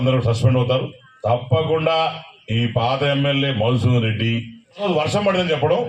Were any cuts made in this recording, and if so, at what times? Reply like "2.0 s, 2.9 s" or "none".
1.0 s, 4.8 s

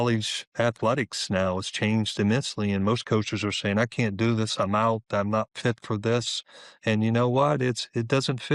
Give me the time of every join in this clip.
none

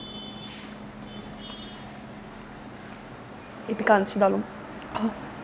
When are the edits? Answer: none

